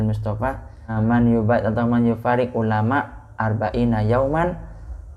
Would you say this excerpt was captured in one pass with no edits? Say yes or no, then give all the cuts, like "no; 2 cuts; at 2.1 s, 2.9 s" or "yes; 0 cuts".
no; 1 cut; at 0.9 s